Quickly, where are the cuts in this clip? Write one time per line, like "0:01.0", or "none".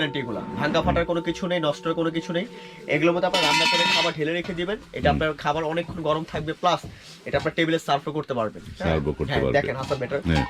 none

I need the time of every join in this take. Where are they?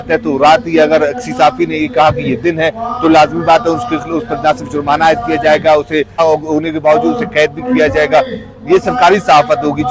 0:06.2

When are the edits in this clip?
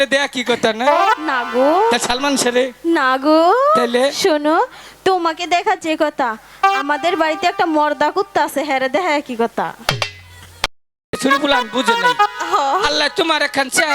0:11.1

